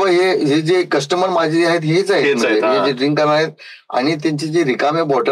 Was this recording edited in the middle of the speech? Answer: no; 0 cuts

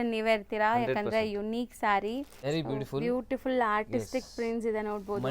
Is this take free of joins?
no; 1 cut; at 2.3 s

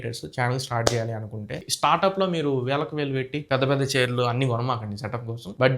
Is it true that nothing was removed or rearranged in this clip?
no; 1 cut; at 1.5 s

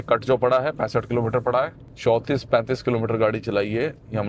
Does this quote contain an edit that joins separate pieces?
yes; 1 cut; at 1.8 s

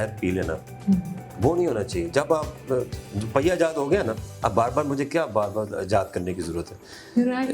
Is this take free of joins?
yes; 0 cuts

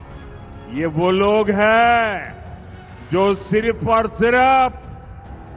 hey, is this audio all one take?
yes; 0 cuts

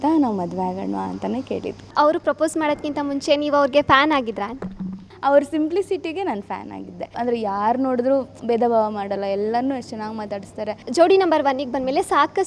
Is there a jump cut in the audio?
yes; 4 cuts; at 1.9 s, 5.1 s, 7.2 s, 10.9 s

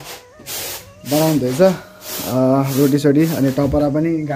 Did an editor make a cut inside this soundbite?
no; 0 cuts

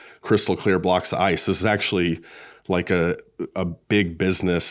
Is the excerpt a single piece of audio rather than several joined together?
yes; 0 cuts

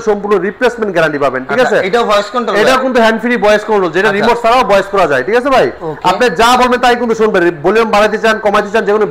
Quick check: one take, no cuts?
yes; 0 cuts

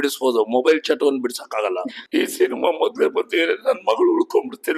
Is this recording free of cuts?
no; 1 cut; at 1.9 s

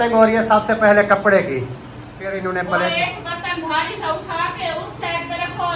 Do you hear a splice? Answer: yes; 1 cut; at 2.3 s

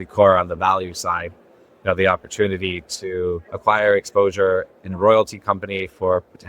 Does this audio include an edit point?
yes; 1 cut; at 3.5 s

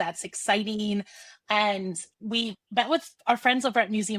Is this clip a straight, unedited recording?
no; 1 cut; at 3.2 s

